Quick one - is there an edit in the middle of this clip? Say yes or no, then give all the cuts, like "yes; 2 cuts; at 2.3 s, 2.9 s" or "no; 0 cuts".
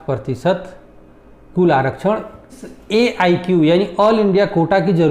yes; 1 cut; at 2.6 s